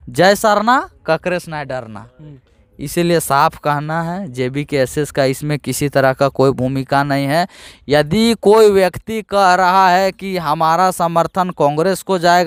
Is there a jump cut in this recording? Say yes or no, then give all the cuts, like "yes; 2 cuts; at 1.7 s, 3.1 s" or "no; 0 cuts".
no; 0 cuts